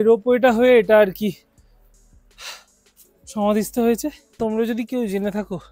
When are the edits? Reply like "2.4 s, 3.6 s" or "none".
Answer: 4.2 s